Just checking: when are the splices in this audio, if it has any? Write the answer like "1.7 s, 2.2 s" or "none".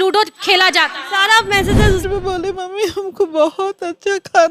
2.0 s